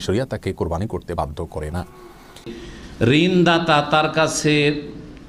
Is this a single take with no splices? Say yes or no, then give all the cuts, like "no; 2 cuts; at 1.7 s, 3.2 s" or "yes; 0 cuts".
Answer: no; 1 cut; at 2.5 s